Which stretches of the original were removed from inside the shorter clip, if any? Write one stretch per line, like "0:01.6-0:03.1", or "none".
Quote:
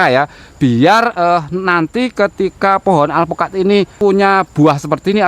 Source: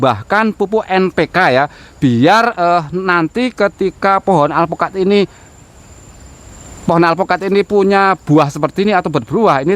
0:05.4-0:07.7